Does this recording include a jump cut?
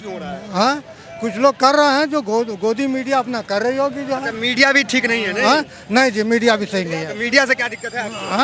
no; 0 cuts

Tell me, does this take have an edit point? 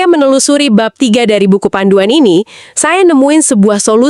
no; 0 cuts

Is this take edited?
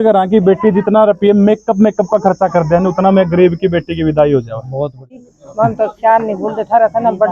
yes; 1 cut; at 5.3 s

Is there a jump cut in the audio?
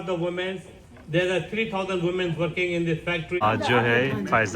yes; 1 cut; at 3.4 s

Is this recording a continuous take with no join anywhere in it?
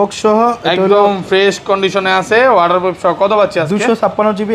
yes; 0 cuts

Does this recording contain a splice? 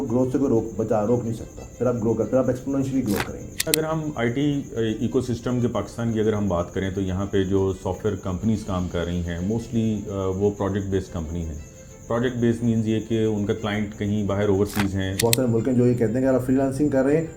yes; 2 cuts; at 3.7 s, 15.2 s

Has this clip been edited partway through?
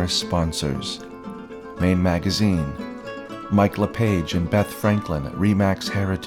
no; 0 cuts

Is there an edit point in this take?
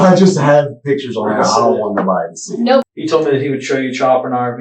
yes; 1 cut; at 2.9 s

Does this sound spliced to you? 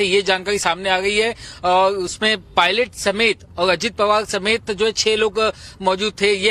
yes; 1 cut; at 2.1 s

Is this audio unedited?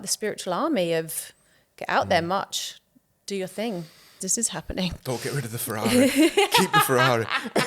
no; 1 cut; at 4.2 s

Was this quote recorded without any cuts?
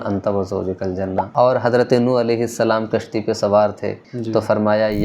no; 2 cuts; at 1.2 s, 4.1 s

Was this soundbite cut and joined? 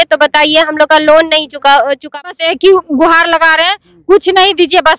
yes; 1 cut; at 2.2 s

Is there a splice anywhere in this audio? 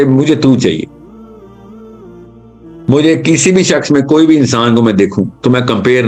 no; 0 cuts

